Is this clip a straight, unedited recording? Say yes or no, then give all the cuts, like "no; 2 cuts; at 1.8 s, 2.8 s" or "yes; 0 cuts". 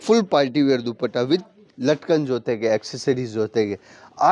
yes; 0 cuts